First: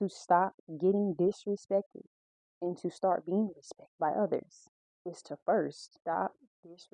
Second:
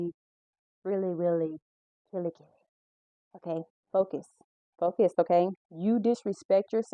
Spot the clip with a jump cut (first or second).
second